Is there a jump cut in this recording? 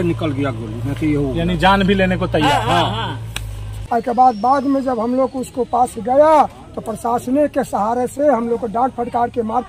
yes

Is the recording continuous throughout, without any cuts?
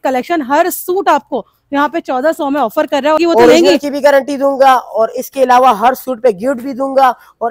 no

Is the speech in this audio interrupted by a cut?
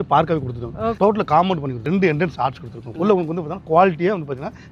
yes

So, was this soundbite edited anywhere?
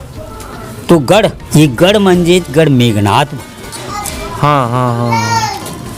yes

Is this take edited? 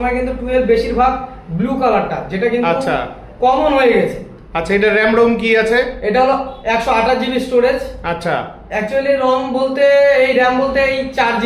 no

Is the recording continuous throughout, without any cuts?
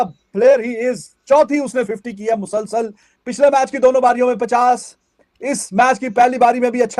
yes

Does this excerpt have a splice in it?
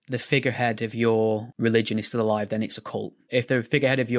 yes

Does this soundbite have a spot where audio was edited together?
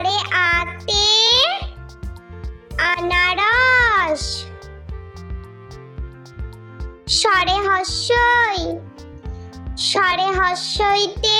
no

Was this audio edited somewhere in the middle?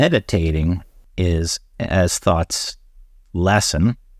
yes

